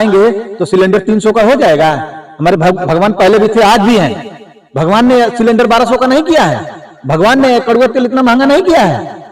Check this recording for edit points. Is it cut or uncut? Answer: uncut